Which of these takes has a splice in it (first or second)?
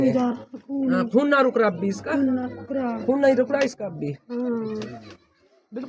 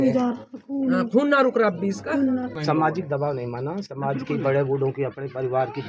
second